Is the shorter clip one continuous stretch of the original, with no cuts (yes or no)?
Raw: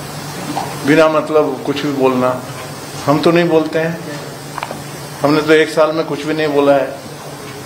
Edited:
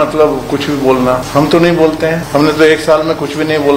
no